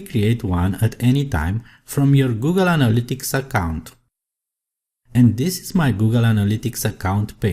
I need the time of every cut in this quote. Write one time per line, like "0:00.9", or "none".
0:06.2